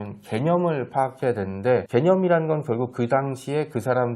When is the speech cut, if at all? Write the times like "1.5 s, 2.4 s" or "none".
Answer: 1.9 s